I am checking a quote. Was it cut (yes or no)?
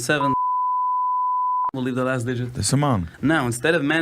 yes